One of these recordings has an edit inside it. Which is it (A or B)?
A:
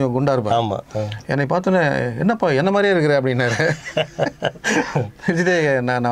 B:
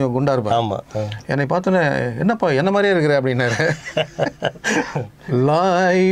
B